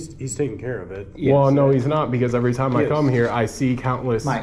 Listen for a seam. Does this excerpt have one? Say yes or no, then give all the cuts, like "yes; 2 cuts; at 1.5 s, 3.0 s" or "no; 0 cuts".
no; 0 cuts